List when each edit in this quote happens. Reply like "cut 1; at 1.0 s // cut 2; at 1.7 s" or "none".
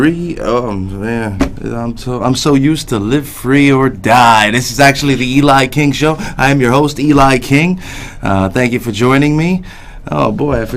cut 1; at 6.2 s